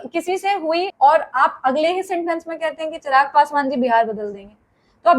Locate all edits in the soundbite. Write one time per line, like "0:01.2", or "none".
0:00.9